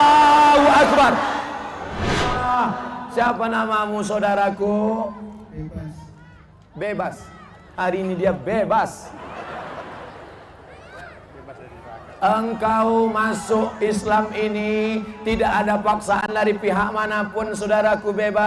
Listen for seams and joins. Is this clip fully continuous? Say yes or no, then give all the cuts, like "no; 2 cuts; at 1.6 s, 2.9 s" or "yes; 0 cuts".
no; 1 cut; at 2.3 s